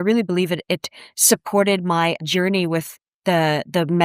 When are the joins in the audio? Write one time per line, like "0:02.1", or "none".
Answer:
0:02.2